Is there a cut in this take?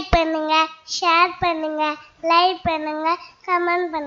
no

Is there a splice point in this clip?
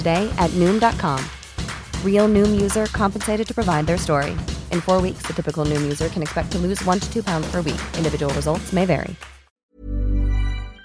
yes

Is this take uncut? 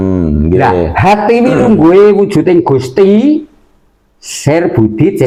yes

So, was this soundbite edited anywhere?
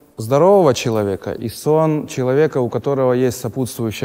no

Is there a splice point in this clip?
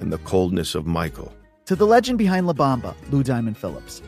yes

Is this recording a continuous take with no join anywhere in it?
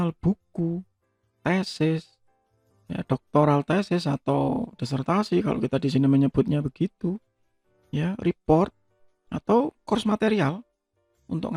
yes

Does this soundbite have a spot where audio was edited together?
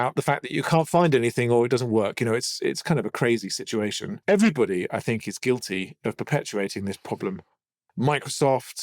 yes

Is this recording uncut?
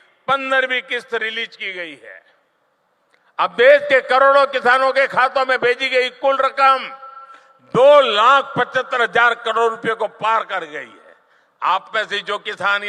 yes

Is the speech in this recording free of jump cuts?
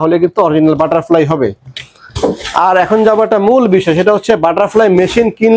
yes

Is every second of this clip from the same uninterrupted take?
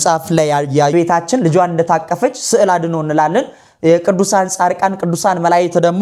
no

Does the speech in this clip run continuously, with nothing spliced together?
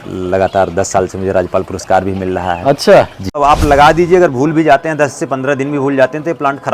no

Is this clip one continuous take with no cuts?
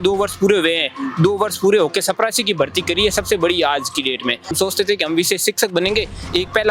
no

